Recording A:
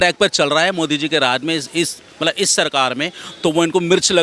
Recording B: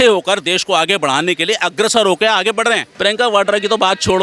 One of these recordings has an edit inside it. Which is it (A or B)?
B